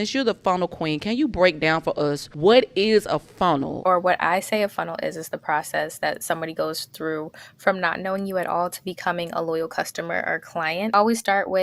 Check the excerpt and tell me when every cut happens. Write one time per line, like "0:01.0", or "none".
0:02.3
0:03.7
0:10.9